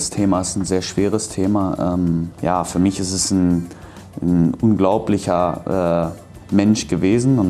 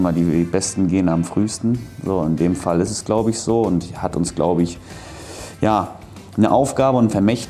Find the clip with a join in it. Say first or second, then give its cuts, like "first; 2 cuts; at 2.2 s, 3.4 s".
first; 1 cut; at 2.3 s